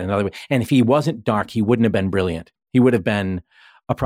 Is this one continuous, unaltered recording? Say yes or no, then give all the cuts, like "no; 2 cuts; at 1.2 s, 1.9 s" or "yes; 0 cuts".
yes; 0 cuts